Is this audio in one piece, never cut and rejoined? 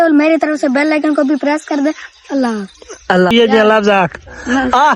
no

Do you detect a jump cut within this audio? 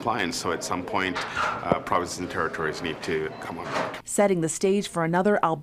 no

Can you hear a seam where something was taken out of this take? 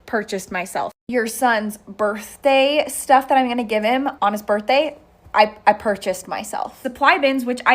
yes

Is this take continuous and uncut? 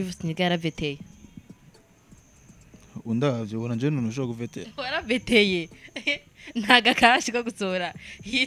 yes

